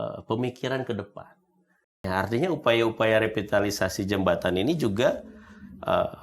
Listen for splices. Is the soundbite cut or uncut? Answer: cut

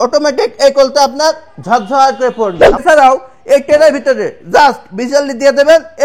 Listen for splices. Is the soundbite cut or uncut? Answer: cut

